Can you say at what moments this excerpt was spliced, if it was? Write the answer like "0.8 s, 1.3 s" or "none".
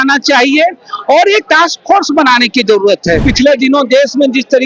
3.2 s